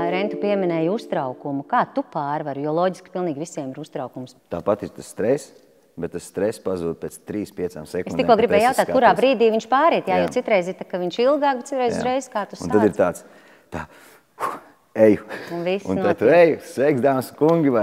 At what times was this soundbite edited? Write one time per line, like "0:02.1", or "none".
0:04.3